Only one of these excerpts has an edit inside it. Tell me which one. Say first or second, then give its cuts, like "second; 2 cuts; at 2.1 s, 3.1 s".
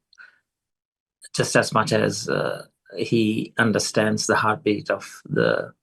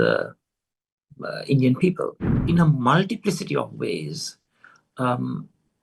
second; 1 cut; at 2.5 s